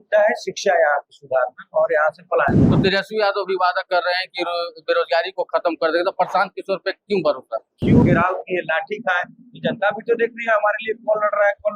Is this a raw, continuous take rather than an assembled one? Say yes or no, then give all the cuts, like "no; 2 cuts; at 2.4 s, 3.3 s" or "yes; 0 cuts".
no; 2 cuts; at 2.7 s, 8.0 s